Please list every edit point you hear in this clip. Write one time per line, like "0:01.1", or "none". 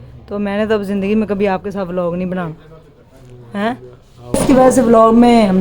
0:04.4